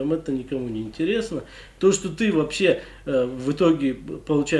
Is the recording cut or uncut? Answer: uncut